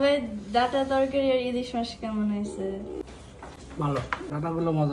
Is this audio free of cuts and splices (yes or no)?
yes